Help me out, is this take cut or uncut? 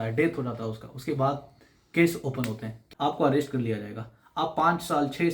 cut